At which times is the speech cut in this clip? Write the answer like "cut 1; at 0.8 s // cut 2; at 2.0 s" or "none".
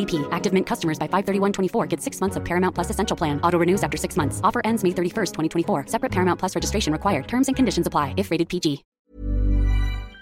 cut 1; at 9.0 s